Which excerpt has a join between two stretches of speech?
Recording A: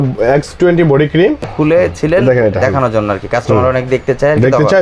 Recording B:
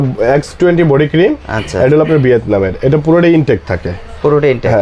A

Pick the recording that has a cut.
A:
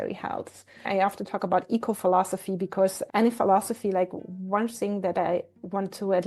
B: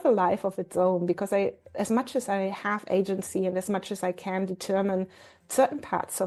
A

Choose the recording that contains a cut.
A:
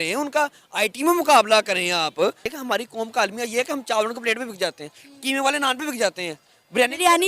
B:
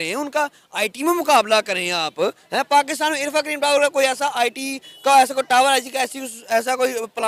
A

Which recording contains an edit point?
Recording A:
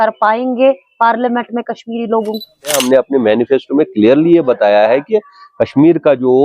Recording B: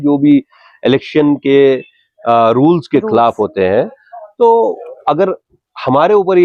A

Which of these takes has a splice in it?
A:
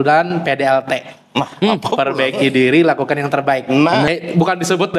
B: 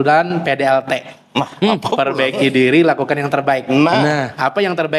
A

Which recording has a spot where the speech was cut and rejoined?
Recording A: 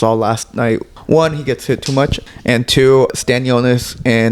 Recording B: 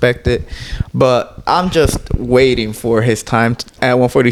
A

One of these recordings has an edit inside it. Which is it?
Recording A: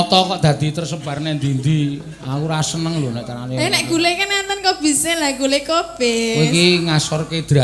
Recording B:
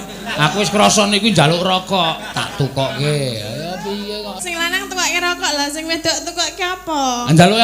B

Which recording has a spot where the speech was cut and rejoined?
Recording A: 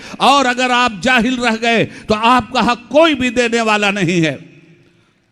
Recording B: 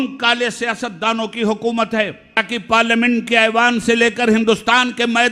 B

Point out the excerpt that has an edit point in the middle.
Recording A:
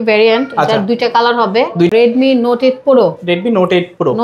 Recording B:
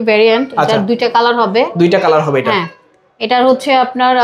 A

